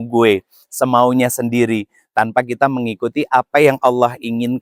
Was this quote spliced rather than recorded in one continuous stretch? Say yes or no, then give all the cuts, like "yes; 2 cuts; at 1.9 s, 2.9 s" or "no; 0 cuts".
no; 0 cuts